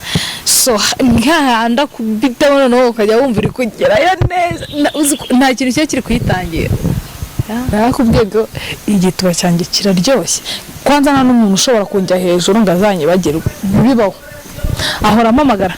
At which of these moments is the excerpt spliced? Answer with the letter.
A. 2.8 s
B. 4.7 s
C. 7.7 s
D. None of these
C